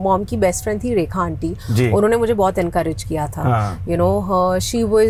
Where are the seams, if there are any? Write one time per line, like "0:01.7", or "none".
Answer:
none